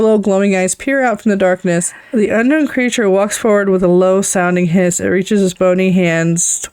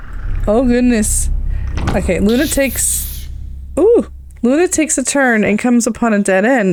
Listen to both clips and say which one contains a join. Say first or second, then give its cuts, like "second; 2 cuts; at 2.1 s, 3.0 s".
first; 1 cut; at 2.0 s